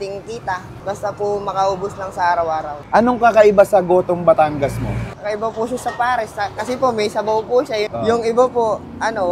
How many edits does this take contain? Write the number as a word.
two